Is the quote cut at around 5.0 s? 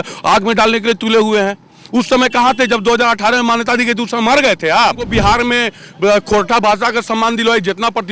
yes; 1 cut; at 5.0 s

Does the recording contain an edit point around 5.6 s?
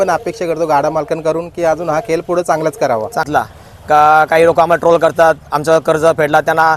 no; 1 cut; at 3.3 s

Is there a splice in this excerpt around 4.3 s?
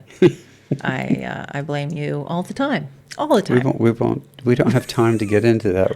no; 2 cuts; at 1.2 s, 3.0 s

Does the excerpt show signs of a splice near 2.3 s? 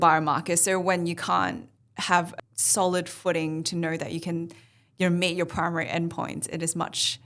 yes; 1 cut; at 2.3 s

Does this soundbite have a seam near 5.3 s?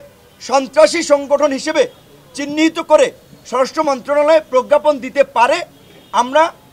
no; 0 cuts

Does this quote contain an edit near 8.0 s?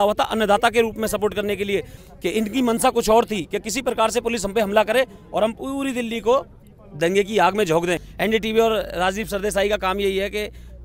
yes; 2 cuts; at 1.9 s, 8.0 s

